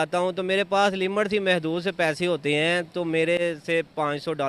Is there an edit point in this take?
no; 0 cuts

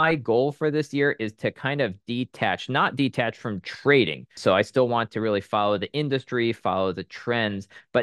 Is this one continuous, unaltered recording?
no; 1 cut; at 4.3 s

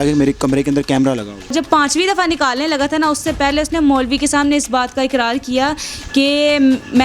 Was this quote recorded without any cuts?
no; 1 cut; at 1.5 s

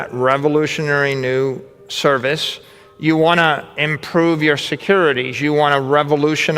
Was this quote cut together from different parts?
no; 0 cuts

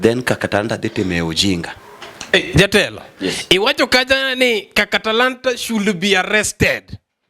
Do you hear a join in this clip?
yes; 1 cut; at 1.6 s

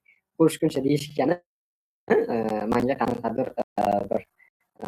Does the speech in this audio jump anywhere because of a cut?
no; 0 cuts

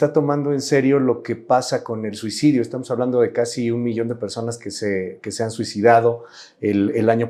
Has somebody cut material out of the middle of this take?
no; 0 cuts

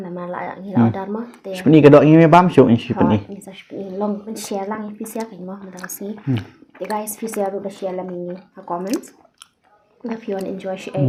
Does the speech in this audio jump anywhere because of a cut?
no; 0 cuts

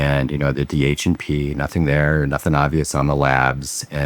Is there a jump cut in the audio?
no; 0 cuts

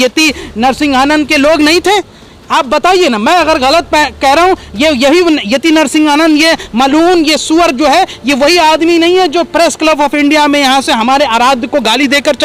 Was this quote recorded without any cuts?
yes; 0 cuts

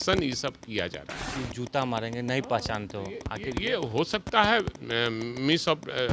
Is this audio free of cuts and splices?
no; 1 cut; at 1.3 s

